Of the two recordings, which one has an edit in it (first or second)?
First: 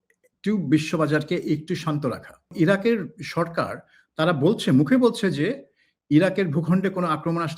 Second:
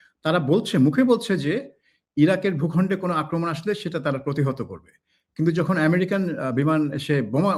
first